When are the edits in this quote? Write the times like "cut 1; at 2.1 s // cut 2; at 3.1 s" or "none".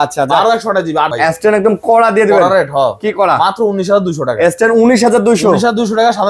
cut 1; at 1.1 s